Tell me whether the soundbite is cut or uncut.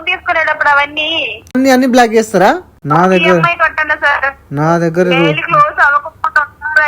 cut